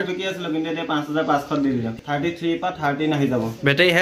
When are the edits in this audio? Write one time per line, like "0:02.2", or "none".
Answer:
0:01.9